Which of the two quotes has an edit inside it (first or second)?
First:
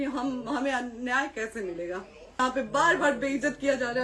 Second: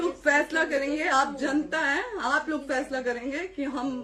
first